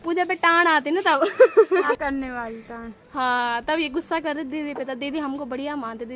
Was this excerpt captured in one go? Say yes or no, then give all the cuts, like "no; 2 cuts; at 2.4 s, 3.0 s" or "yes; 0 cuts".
yes; 0 cuts